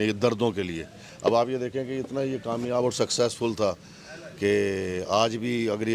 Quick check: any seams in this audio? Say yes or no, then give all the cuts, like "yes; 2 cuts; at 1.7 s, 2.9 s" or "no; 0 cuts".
no; 0 cuts